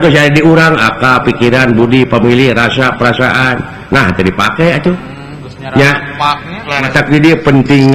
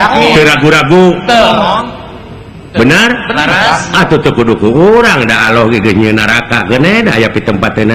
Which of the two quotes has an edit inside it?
first; 1 cut; at 6.9 s

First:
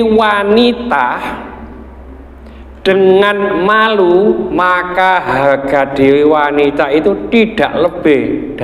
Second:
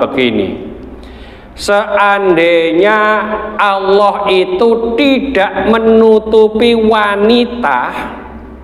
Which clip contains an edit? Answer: first; 1 cut; at 4.5 s

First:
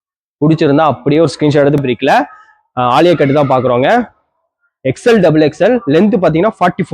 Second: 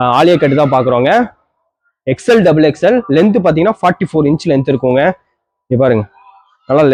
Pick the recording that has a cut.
first; 1 cut; at 1.8 s

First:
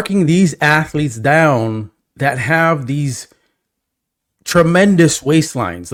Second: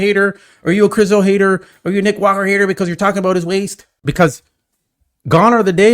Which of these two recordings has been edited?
second; 1 cut; at 3.9 s

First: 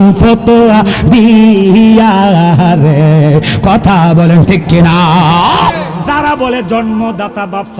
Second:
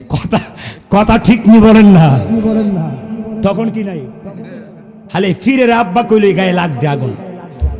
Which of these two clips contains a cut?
first; 1 cut; at 6.0 s

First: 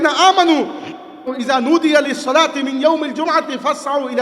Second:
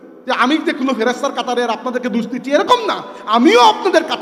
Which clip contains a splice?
first; 1 cut; at 1.3 s

